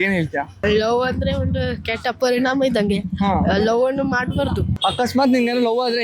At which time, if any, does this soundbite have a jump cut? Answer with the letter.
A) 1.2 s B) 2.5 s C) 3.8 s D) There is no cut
D